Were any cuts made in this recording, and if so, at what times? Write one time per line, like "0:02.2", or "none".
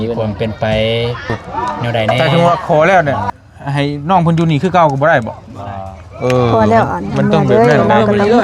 0:02.2